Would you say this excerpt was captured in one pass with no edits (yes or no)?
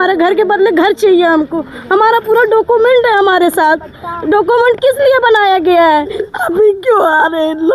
no